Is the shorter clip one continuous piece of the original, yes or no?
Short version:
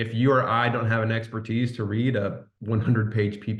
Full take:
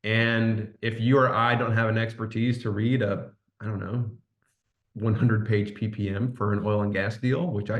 no